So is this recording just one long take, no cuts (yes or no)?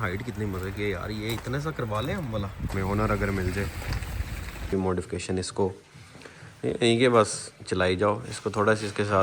no